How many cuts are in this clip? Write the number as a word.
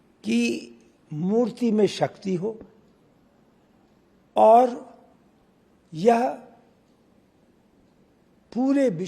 zero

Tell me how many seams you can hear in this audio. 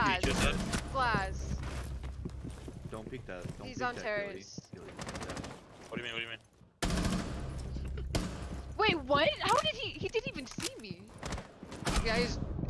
one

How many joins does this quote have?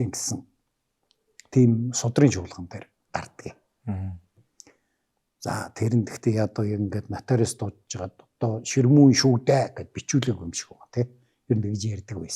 zero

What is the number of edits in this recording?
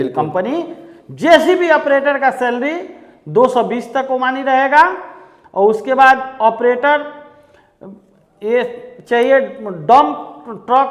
zero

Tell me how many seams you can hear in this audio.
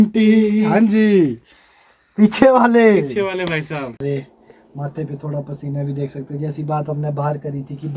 one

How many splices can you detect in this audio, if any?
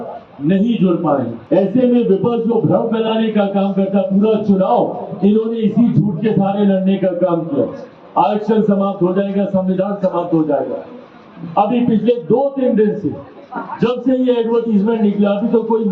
one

